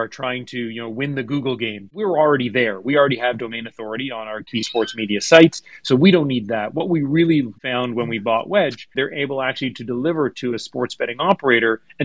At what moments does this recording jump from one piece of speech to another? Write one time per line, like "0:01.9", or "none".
0:02.1
0:04.5
0:07.6
0:08.9